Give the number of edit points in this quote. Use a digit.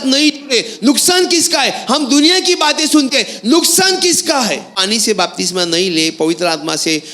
1